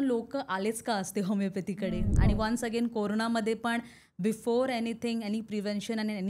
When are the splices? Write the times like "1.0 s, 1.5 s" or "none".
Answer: 2.1 s

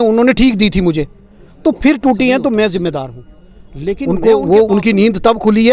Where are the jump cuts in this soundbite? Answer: 4.0 s

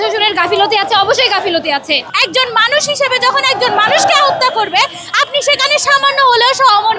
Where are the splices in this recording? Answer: 2.1 s

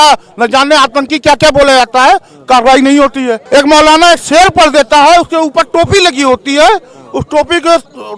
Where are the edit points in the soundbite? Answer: 3.4 s

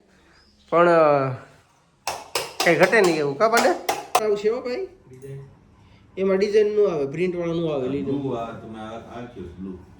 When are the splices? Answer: 4.2 s

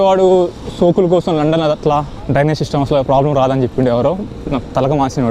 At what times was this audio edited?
2.2 s

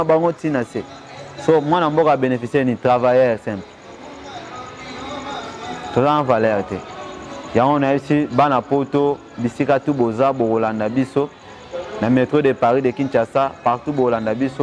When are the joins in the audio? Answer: none

